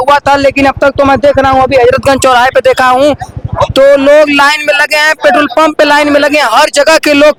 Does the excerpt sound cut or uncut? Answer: uncut